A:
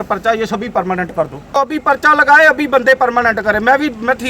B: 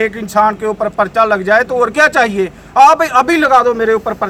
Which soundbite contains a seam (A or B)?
A